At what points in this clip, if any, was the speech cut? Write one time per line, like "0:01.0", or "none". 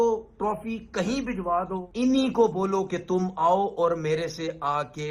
0:01.9